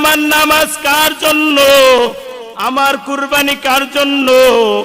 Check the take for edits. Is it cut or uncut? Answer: cut